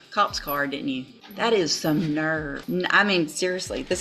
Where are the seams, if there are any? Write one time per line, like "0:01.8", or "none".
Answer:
0:01.2
0:02.6